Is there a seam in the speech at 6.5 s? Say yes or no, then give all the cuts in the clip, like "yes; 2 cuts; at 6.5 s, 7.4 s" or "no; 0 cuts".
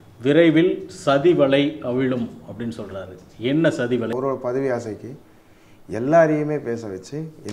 no; 1 cut; at 4.1 s